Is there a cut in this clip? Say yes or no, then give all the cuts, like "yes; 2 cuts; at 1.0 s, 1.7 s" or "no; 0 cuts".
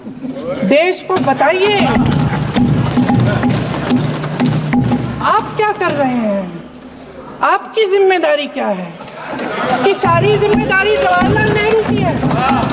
no; 0 cuts